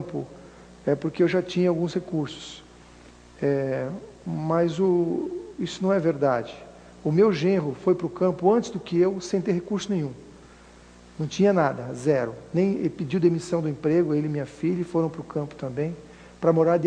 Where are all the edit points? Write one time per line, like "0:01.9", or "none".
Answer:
0:08.7